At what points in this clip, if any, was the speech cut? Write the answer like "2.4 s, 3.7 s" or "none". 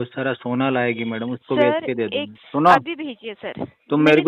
2.4 s